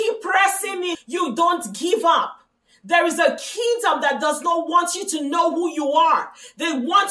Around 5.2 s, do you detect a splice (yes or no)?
no